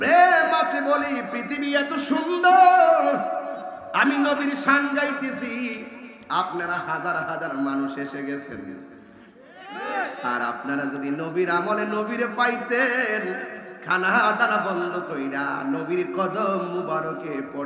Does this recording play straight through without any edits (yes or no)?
yes